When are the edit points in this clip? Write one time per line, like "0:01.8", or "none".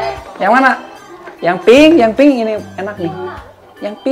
none